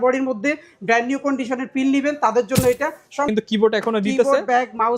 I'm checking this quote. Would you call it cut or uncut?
cut